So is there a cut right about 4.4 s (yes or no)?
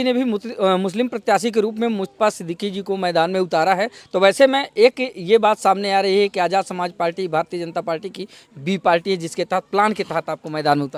no